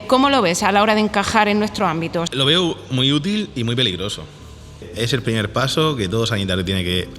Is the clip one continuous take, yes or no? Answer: no